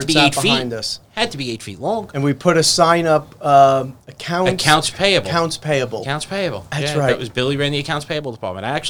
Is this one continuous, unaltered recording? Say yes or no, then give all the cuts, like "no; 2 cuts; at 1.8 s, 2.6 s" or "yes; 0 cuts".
yes; 0 cuts